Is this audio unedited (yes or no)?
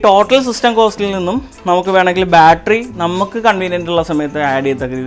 yes